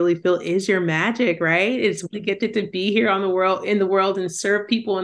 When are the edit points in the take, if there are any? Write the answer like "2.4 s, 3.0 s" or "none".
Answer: 2.0 s

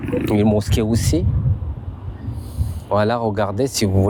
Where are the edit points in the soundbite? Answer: none

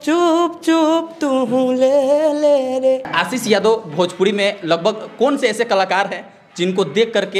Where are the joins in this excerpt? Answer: 3.1 s

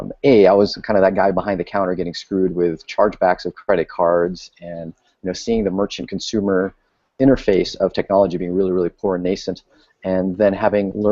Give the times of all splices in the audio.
5.8 s

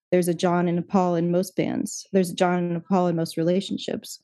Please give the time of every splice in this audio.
none

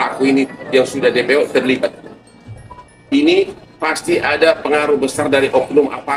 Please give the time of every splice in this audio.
none

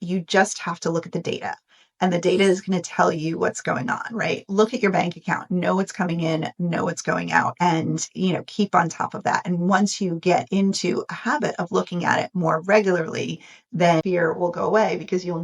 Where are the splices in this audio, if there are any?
14.0 s

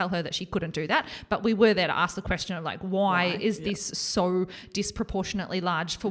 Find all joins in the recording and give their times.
none

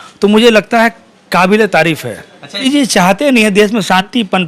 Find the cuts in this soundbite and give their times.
2.7 s

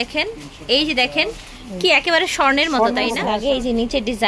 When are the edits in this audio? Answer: 3.2 s

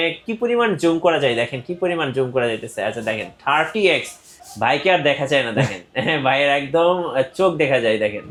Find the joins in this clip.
none

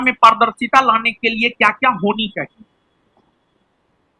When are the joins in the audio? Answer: none

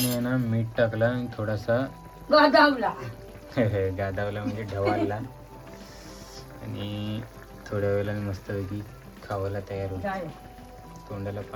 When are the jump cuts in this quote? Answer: none

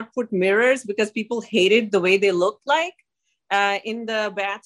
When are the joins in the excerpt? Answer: none

